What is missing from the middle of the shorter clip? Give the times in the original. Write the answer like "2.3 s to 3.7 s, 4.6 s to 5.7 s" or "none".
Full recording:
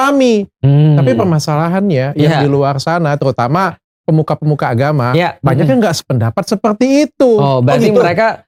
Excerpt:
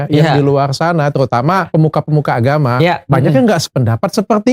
3.7 s to 4.0 s